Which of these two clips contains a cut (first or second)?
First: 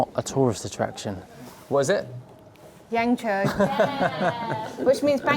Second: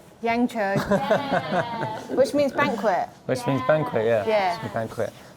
first